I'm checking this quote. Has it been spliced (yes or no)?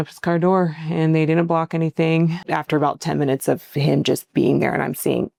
no